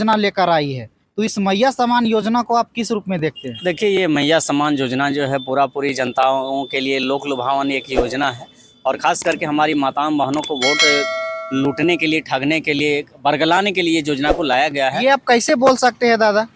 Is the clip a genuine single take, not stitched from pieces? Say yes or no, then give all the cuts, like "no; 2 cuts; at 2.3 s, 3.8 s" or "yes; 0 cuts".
yes; 0 cuts